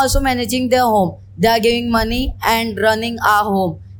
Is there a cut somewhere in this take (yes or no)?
no